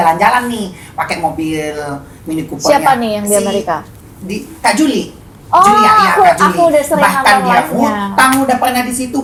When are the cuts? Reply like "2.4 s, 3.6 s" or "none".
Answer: none